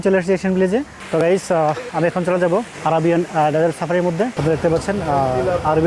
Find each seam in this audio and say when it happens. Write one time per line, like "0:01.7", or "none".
0:01.0
0:04.3

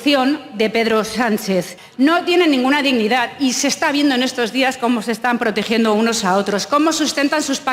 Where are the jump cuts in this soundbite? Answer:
0:01.8

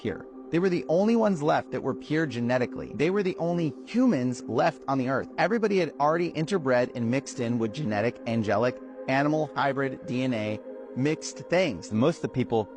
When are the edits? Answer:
0:11.0

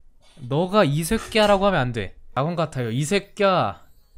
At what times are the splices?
0:02.2

